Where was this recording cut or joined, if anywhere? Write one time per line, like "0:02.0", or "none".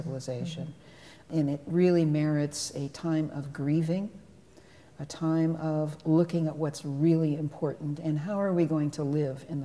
0:01.3